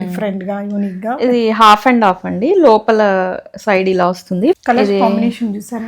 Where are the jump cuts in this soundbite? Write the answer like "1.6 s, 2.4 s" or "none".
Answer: 4.6 s